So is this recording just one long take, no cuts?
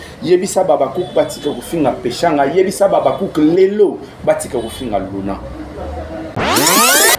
no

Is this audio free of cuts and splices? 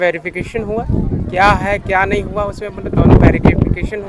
yes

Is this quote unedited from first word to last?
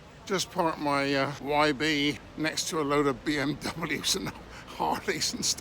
no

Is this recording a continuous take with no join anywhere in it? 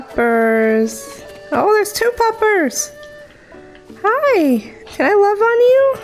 yes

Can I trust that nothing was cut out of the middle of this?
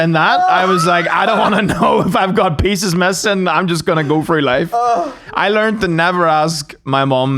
yes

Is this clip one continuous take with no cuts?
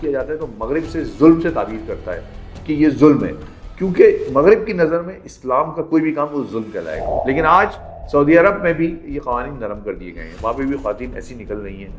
no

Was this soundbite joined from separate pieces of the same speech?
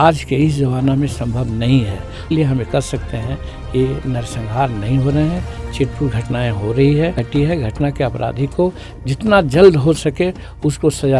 yes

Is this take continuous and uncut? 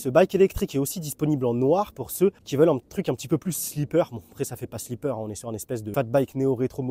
no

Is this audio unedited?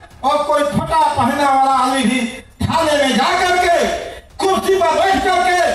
yes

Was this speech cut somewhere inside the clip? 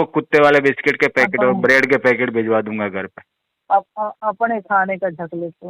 no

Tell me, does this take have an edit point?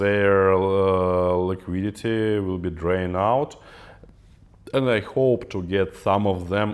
no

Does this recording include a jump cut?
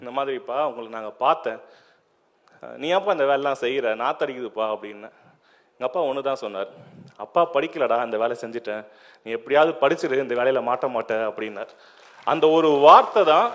no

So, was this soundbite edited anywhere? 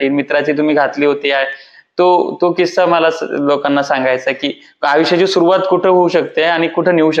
no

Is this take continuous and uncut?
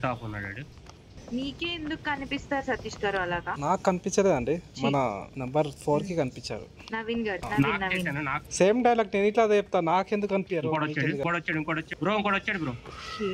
yes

